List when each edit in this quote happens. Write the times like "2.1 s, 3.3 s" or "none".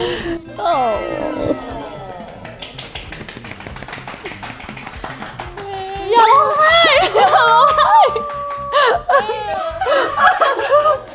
none